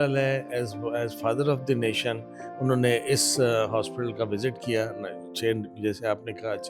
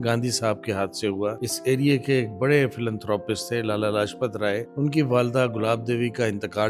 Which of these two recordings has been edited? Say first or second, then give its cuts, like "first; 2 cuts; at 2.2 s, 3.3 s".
second; 2 cuts; at 1.5 s, 4.7 s